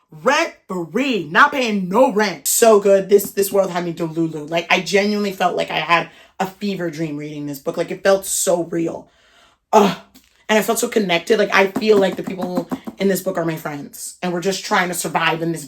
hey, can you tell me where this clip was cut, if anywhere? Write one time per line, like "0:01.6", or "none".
0:02.4

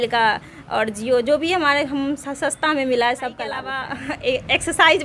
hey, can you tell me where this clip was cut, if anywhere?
0:03.8

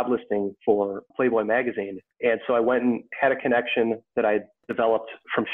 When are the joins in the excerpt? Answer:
0:01.9
0:03.1

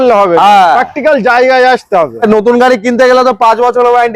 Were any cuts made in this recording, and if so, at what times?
0:02.2

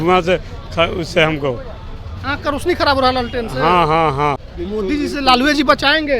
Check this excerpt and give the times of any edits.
0:04.5

